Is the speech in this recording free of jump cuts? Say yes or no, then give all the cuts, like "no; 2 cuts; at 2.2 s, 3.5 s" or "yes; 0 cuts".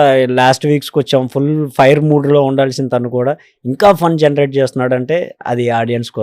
yes; 0 cuts